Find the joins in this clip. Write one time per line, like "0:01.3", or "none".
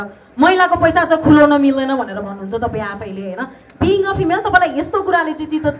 none